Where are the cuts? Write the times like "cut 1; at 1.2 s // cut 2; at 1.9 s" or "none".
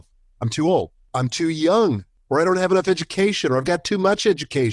cut 1; at 1.1 s // cut 2; at 2.1 s